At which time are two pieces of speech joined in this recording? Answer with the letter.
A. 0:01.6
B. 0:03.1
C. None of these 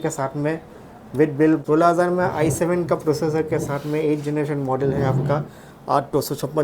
A